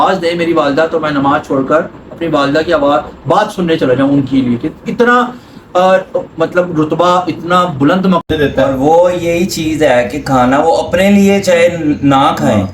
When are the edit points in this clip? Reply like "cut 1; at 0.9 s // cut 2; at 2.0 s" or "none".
cut 1; at 8.2 s